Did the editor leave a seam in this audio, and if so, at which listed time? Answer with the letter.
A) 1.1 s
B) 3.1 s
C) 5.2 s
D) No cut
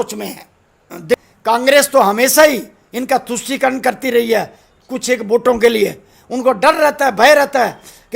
A